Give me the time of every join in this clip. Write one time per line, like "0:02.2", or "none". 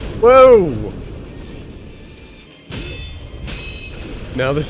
0:02.5